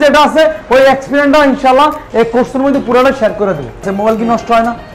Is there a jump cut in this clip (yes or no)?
yes